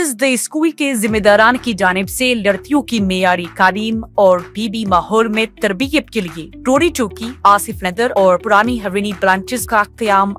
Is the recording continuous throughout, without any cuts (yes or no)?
yes